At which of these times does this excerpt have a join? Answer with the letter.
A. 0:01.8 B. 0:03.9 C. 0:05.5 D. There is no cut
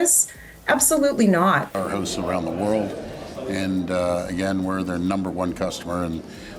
A